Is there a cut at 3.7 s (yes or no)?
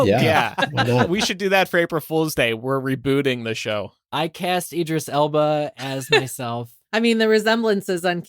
no